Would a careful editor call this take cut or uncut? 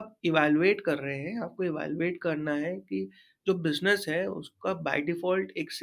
uncut